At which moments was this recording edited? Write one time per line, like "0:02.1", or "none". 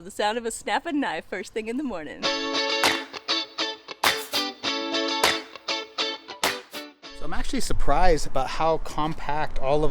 0:02.1
0:06.7